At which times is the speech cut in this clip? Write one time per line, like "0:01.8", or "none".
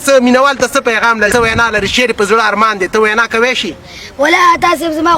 0:01.3